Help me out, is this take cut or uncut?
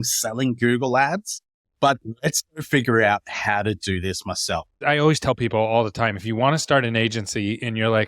cut